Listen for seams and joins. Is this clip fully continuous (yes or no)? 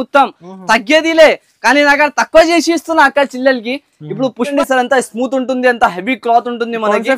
no